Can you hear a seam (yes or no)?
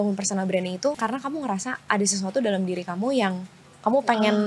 yes